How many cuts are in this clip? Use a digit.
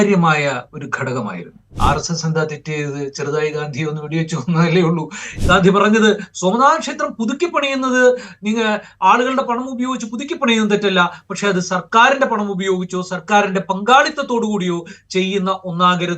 2